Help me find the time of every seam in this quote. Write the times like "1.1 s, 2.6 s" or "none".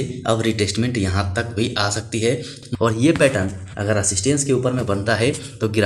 2.5 s